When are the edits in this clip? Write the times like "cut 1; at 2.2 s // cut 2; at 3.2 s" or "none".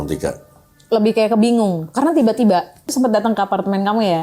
cut 1; at 2.9 s